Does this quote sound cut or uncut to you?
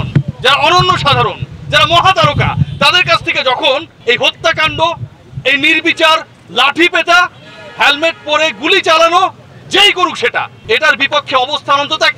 cut